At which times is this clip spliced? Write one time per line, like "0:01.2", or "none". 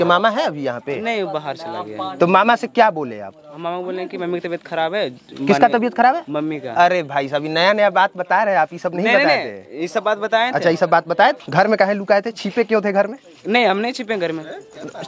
0:11.4